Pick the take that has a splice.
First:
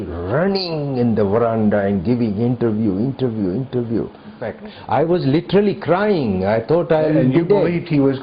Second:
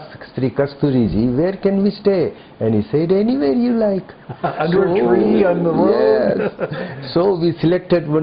first; 1 cut; at 4.5 s

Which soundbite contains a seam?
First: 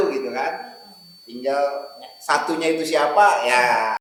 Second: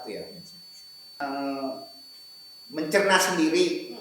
second; 1 cut; at 1.2 s

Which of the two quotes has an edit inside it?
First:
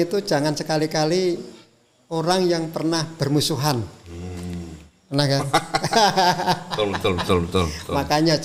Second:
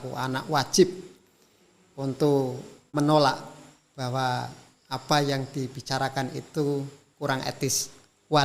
second; 1 cut; at 2.9 s

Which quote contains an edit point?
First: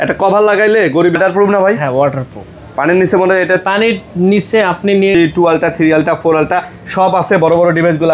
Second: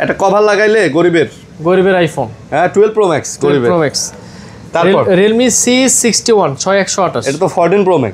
first; 2 cuts; at 1.1 s, 5.1 s

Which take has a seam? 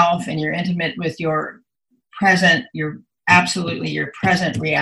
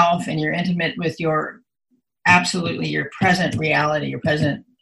second; 1 cut; at 2.0 s

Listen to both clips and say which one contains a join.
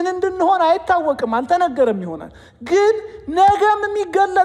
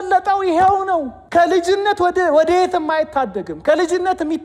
second; 1 cut; at 1.2 s

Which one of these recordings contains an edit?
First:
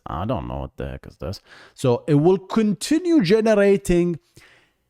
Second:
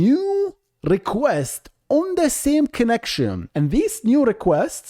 second; 1 cut; at 3.4 s

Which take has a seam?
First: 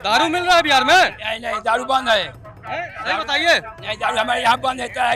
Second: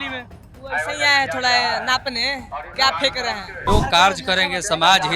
second; 1 cut; at 3.7 s

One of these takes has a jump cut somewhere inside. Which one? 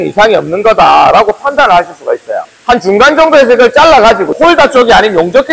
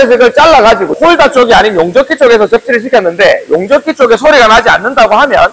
first; 1 cut; at 2.4 s

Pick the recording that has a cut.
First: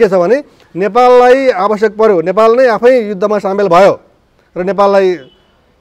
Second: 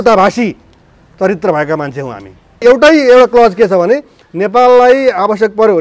second; 1 cut; at 2.6 s

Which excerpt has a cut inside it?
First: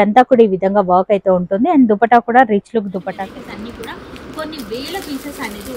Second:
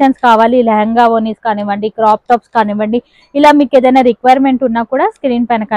first; 1 cut; at 3.0 s

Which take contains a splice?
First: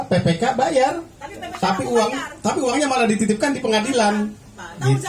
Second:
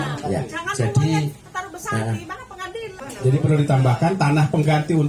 second; 1 cut; at 3.0 s

